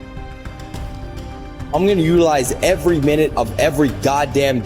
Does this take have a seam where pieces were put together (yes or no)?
yes